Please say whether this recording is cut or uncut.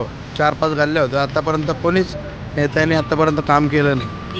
uncut